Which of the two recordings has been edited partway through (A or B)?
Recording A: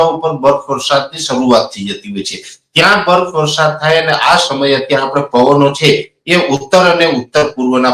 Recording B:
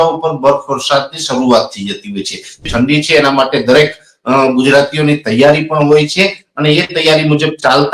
B